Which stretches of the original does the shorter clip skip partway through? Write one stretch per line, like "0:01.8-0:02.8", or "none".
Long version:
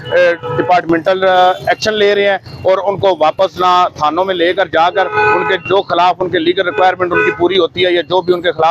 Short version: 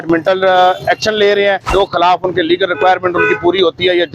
0:02.5-0:05.6

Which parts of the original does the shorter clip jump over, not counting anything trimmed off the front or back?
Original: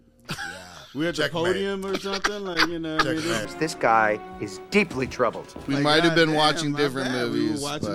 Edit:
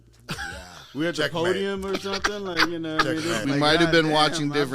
0:03.4-0:05.6

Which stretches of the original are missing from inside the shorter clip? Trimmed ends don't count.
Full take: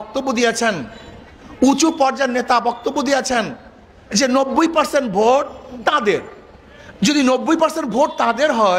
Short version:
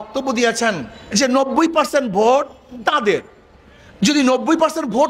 0:00.9-0:03.9

